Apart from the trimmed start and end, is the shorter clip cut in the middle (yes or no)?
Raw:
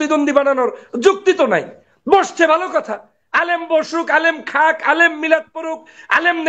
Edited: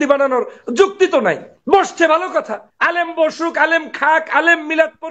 yes